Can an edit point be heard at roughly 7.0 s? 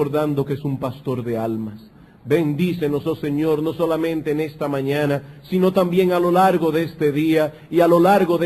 no; 0 cuts

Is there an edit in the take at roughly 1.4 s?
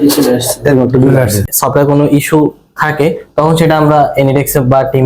yes; 1 cut; at 1.4 s

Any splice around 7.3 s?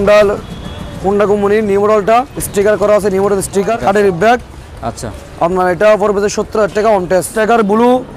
yes; 3 cuts; at 2.4 s, 3.7 s, 7.3 s

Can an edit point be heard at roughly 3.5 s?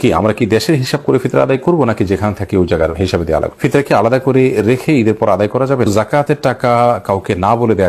yes; 2 cuts; at 3.5 s, 5.9 s

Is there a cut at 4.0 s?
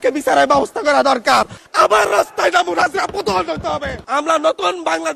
yes; 2 cuts; at 1.6 s, 4.0 s

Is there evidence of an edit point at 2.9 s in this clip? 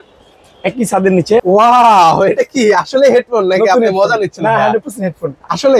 no; 1 cut; at 1.4 s

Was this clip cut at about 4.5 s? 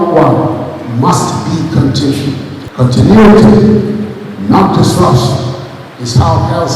no; 1 cut; at 2.6 s

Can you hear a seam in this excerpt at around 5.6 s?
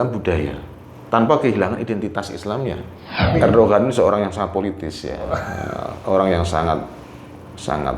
no; 1 cut; at 3.3 s

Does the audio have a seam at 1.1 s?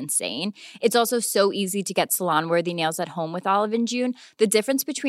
no; 0 cuts

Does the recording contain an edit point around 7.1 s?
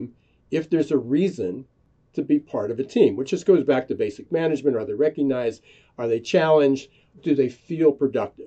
yes; 1 cut; at 7.1 s

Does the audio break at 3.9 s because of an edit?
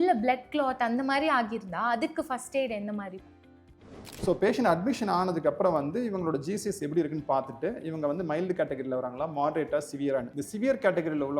yes; 1 cut; at 3.9 s

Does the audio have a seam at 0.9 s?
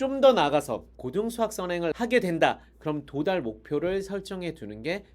yes; 2 cuts; at 0.9 s, 1.9 s

